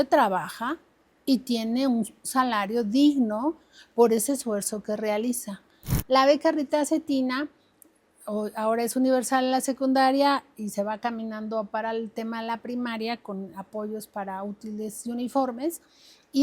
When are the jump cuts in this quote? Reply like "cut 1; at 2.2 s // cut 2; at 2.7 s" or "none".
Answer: cut 1; at 5.9 s